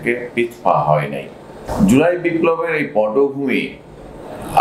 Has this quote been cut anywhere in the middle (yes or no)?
yes